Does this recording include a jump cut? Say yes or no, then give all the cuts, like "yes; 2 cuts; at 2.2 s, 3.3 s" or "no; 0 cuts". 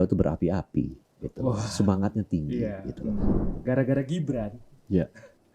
yes; 1 cut; at 3.3 s